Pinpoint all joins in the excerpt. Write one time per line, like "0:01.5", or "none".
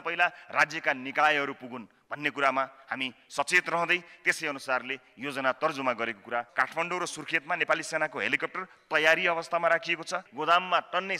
0:06.5
0:10.2